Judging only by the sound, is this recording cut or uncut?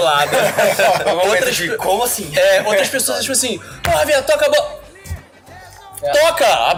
uncut